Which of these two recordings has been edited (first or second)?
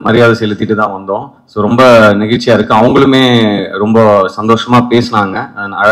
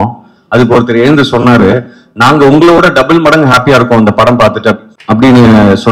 second